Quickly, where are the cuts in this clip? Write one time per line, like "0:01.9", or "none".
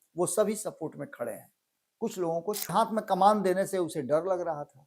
0:02.7